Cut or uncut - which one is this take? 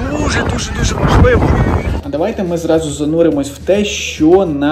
cut